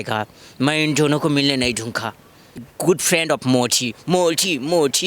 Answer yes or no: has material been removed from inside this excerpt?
yes